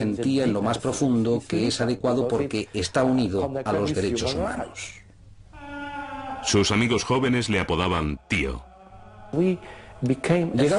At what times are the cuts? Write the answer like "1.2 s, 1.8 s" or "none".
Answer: 9.0 s